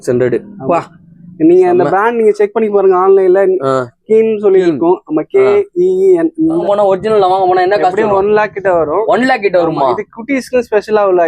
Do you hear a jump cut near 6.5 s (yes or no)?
yes